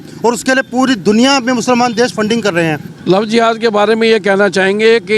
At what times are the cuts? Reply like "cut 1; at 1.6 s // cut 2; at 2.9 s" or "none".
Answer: cut 1; at 2.9 s